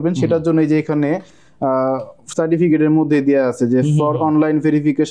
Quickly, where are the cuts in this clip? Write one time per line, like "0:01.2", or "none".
none